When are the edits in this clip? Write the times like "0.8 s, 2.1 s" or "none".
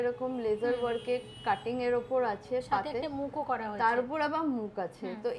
none